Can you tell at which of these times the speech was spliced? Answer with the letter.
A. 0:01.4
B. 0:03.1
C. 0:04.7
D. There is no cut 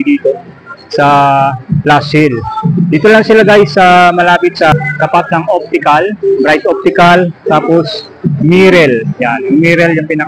C